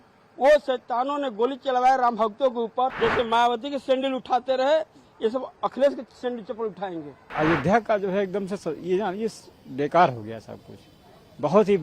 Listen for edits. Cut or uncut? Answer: cut